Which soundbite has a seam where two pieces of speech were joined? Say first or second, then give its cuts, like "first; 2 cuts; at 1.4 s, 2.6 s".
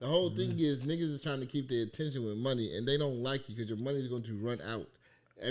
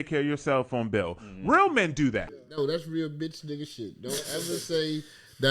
second; 1 cut; at 2.4 s